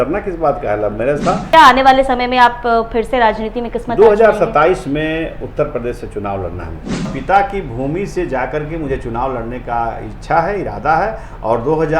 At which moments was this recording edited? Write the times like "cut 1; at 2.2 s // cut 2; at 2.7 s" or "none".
cut 1; at 1.5 s // cut 2; at 7.1 s